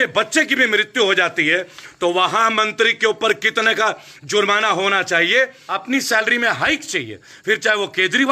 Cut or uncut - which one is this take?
cut